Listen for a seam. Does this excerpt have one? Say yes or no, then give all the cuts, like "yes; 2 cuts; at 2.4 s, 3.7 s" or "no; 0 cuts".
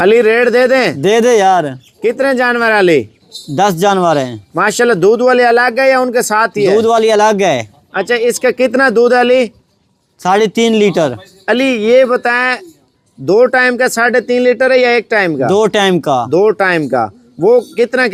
no; 0 cuts